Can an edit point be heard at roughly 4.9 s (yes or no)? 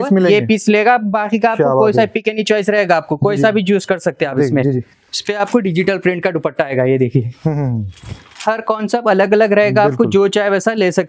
yes